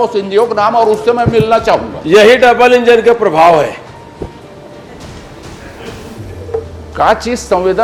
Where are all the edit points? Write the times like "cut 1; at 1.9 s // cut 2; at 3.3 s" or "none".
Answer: none